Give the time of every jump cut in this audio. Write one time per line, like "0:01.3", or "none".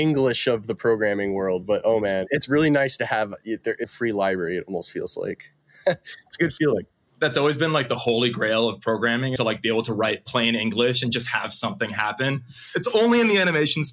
0:02.2
0:03.9
0:09.5
0:12.7